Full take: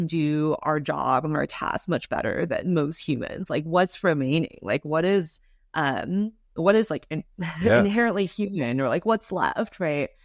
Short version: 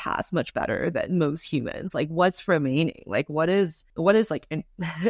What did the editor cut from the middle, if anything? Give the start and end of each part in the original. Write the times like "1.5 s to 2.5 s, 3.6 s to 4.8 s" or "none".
5.4 s to 6.4 s